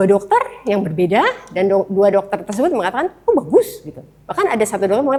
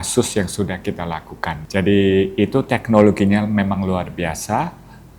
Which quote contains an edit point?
second; 1 cut; at 1.6 s

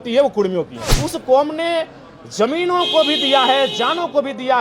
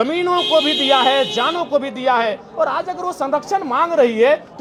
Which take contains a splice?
first; 1 cut; at 1.0 s

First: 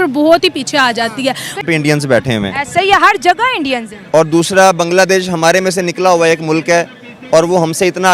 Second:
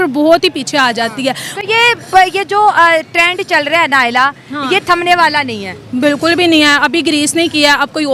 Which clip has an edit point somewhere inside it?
first; 1 cut; at 1.6 s

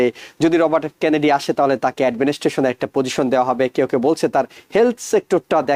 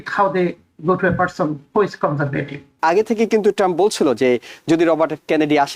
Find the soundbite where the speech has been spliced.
second; 1 cut; at 2.8 s

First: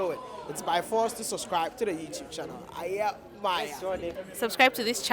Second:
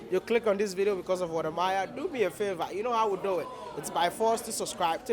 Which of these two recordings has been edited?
first; 1 cut; at 4.1 s

